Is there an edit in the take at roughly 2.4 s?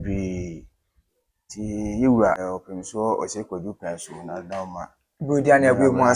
yes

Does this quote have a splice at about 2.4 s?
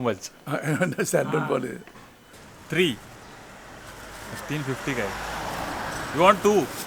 yes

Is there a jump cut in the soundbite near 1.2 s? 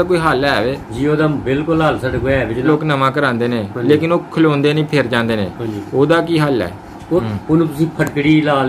no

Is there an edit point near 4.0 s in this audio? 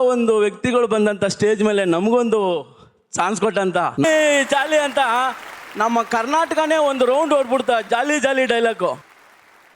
yes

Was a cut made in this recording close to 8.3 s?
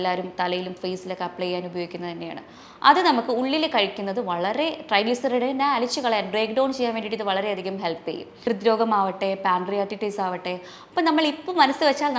yes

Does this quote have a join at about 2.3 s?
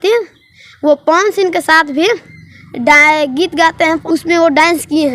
no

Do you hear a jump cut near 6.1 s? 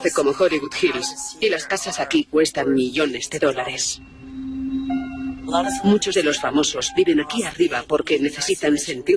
no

